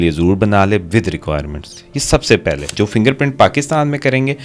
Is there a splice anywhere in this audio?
yes; 1 cut; at 2.7 s

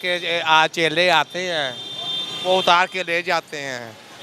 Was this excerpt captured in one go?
yes; 0 cuts

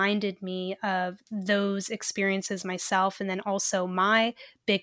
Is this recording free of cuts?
yes; 0 cuts

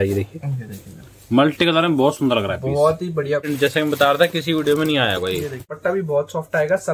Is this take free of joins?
no; 2 cuts; at 3.5 s, 5.7 s

